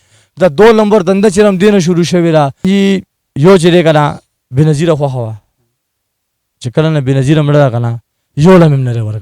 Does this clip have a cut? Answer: yes; 1 cut; at 2.7 s

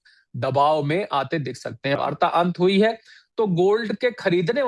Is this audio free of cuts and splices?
no; 1 cut; at 2.0 s

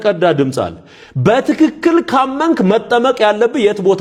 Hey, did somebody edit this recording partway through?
no; 0 cuts

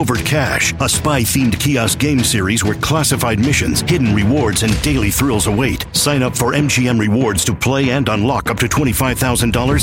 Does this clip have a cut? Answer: no; 0 cuts

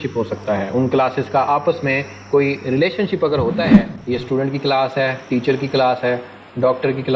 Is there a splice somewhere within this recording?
yes; 1 cut; at 3.9 s

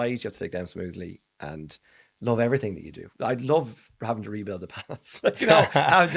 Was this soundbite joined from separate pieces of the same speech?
no; 0 cuts

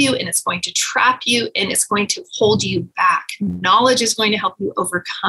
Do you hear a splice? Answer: no; 0 cuts

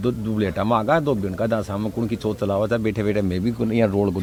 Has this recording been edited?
no; 0 cuts

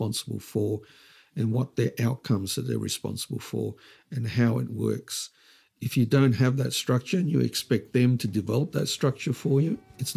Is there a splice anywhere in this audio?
no; 0 cuts

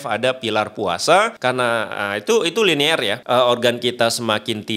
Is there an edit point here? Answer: yes; 2 cuts; at 1.3 s, 3.1 s

